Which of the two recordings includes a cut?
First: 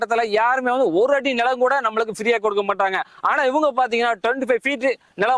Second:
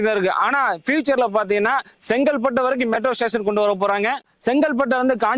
second; 1 cut; at 4.4 s

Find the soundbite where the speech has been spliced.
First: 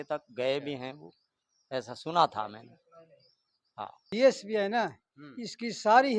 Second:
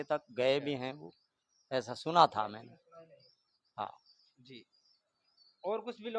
first; 1 cut; at 4.1 s

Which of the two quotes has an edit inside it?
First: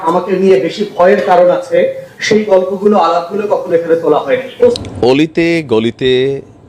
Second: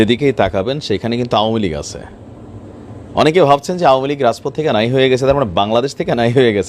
first; 1 cut; at 4.8 s

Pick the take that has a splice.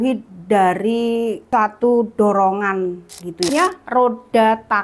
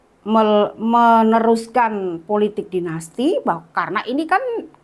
first; 2 cuts; at 1.4 s, 3.5 s

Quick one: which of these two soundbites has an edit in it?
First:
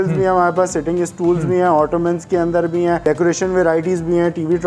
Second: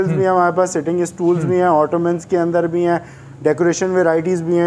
first; 1 cut; at 3.0 s

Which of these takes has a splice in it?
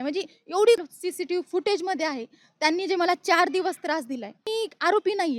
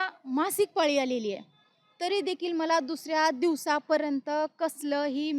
first; 2 cuts; at 0.8 s, 4.5 s

